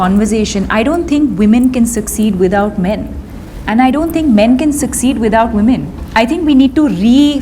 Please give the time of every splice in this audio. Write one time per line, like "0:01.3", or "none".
0:06.0